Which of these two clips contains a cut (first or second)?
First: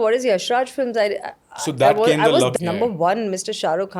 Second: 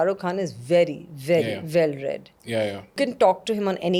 first